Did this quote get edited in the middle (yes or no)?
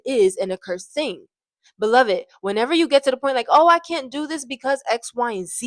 no